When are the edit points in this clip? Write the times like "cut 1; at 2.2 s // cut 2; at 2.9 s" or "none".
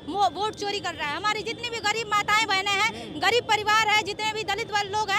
none